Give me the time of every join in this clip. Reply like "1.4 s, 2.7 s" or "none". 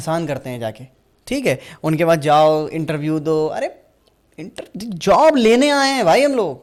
none